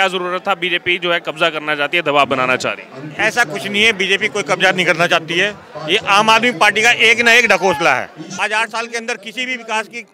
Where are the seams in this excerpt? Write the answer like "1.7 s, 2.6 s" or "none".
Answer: 8.2 s